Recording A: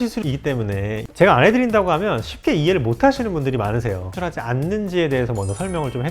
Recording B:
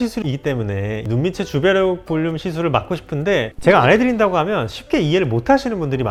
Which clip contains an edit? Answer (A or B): A